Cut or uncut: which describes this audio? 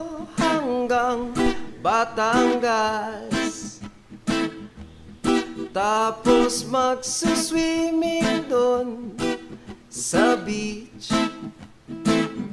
uncut